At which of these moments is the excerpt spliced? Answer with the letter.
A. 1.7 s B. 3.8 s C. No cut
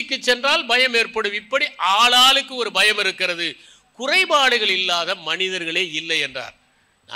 C